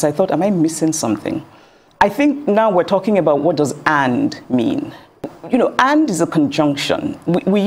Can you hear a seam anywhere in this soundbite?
yes; 2 cuts; at 1.8 s, 5.3 s

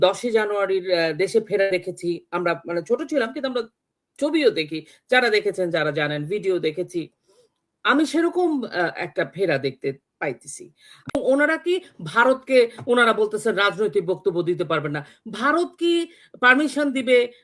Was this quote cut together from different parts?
yes; 1 cut; at 11.1 s

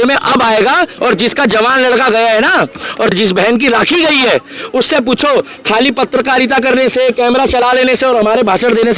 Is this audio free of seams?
no; 2 cuts; at 0.9 s, 3.1 s

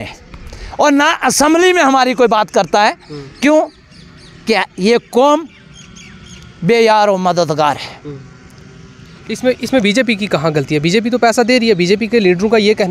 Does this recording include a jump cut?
no; 0 cuts

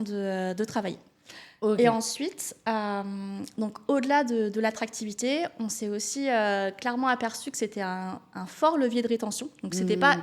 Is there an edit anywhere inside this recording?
no; 0 cuts

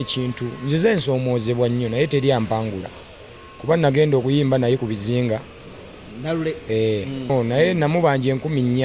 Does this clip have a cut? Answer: yes; 1 cut; at 7.3 s

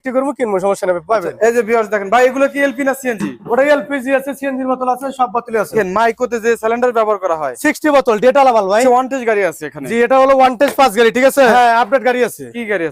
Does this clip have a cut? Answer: yes; 4 cuts; at 1.3 s, 5.7 s, 8.8 s, 11.5 s

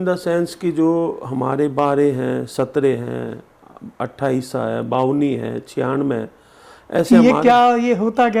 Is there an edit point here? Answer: no; 0 cuts

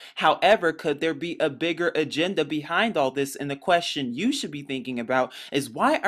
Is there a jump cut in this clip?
no; 0 cuts

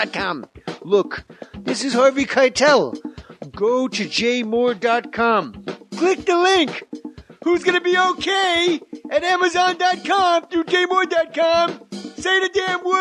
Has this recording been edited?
yes; 1 cut; at 11.0 s

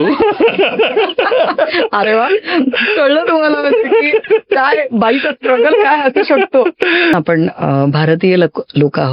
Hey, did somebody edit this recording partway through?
yes; 1 cut; at 7.1 s

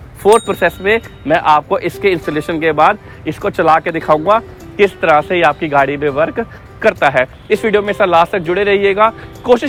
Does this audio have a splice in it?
no; 0 cuts

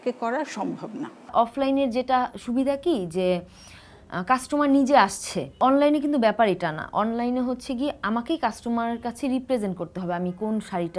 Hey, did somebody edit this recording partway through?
no; 0 cuts

